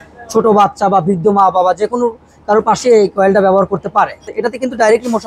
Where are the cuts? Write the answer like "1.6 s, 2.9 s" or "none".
4.3 s